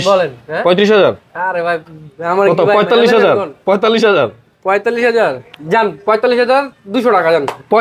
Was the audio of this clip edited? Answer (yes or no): no